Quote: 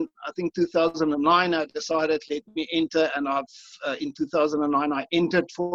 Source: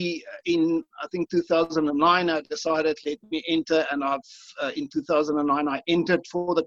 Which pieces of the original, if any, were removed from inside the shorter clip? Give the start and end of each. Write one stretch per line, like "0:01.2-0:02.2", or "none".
none